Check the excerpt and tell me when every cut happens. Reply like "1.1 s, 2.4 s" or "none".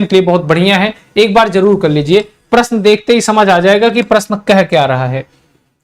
2.9 s